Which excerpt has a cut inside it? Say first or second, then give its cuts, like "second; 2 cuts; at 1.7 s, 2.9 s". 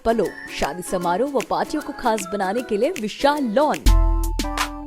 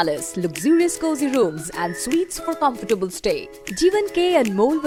first; 1 cut; at 3.9 s